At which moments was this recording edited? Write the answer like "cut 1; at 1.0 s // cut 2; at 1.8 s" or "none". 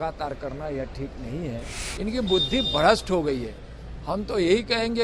cut 1; at 1.8 s